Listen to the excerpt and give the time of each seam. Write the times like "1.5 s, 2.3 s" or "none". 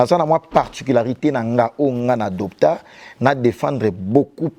none